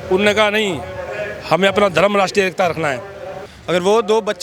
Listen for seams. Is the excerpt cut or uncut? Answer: cut